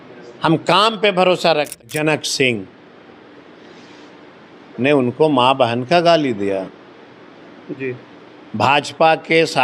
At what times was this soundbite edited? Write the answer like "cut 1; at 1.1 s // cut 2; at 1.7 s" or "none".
cut 1; at 1.8 s